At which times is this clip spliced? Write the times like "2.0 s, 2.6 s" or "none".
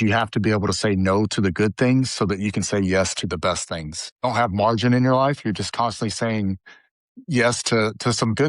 4.2 s